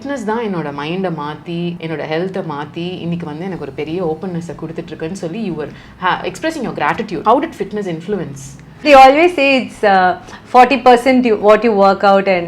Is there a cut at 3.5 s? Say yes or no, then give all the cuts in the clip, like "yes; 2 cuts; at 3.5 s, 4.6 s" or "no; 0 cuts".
no; 3 cuts; at 1.8 s, 7.2 s, 8.8 s